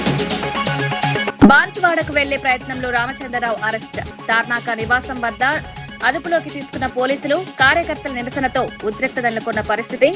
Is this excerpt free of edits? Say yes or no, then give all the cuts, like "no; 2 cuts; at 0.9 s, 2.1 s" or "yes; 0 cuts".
no; 1 cut; at 1.3 s